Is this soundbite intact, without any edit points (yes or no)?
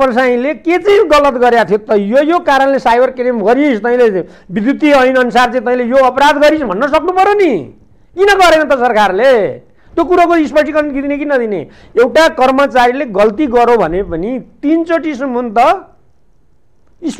yes